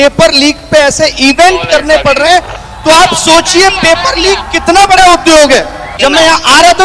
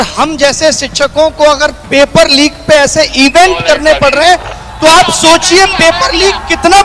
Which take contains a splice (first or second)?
first